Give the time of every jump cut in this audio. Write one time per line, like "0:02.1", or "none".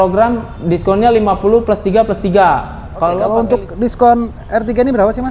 0:03.2